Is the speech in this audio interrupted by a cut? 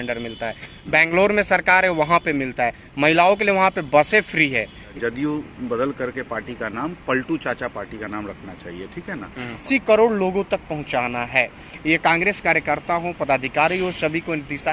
yes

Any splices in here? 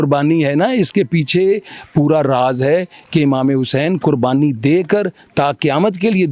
no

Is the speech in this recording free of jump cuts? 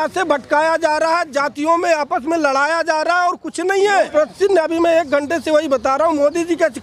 no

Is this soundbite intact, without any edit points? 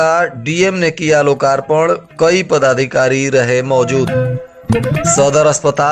no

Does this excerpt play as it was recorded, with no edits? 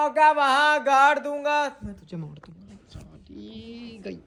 yes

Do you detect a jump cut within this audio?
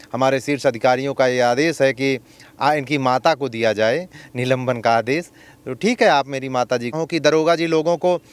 yes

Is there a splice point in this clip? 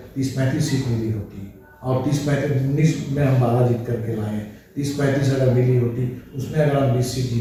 no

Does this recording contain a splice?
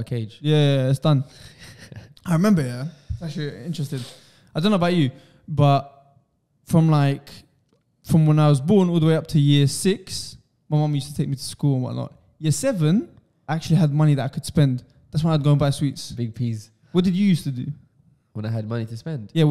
no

